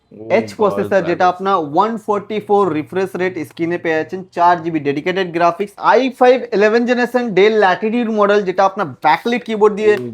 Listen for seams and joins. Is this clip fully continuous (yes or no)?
no